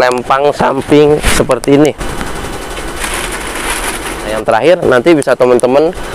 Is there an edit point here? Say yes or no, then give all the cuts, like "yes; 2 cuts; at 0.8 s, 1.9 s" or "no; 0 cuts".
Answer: yes; 1 cut; at 4.4 s